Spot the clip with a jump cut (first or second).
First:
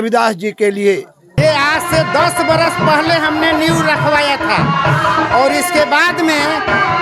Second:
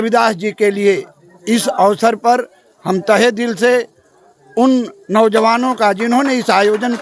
first